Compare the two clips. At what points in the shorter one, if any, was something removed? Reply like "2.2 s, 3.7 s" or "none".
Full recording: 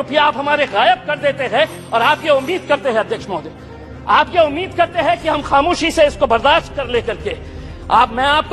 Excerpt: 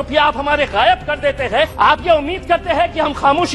1.7 s